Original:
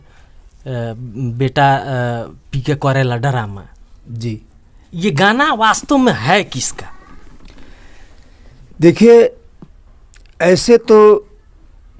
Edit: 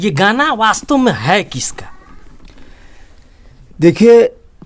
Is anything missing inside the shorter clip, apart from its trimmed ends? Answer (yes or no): no